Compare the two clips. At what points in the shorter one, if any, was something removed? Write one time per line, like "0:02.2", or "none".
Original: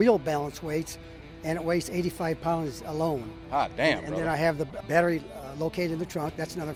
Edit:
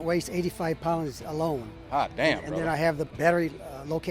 0:03.1